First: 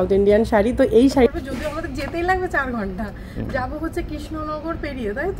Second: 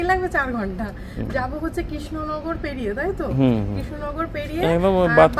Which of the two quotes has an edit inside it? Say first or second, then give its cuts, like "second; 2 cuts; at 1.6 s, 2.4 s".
first; 1 cut; at 1.3 s